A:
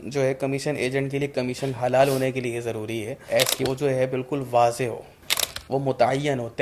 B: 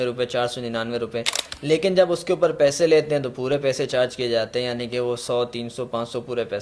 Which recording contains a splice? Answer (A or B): A